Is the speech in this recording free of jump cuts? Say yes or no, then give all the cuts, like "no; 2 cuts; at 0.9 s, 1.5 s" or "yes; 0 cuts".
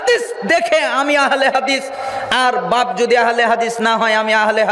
yes; 0 cuts